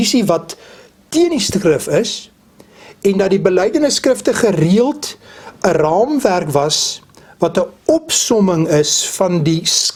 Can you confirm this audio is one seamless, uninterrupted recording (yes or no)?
yes